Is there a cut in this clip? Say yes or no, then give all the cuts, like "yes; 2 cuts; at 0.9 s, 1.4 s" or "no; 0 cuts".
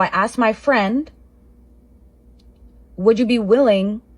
no; 0 cuts